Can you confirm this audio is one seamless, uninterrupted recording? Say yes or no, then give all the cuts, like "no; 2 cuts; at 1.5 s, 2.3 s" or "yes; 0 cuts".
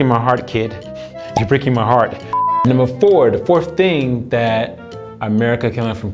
yes; 0 cuts